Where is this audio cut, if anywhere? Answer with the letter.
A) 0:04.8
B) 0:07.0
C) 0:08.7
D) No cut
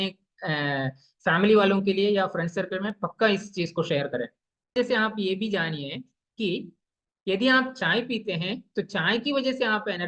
A